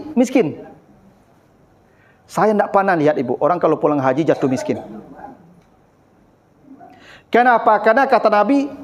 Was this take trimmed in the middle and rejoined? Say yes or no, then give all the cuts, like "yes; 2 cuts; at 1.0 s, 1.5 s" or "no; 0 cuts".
no; 0 cuts